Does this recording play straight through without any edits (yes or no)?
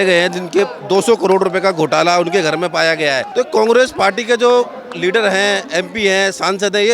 no